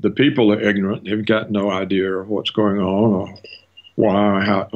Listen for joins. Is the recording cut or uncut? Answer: uncut